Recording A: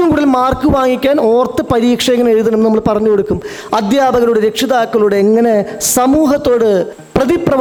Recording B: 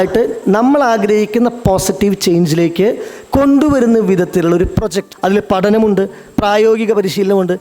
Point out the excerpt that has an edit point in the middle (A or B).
B